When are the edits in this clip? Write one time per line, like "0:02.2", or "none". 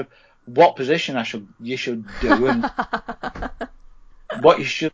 none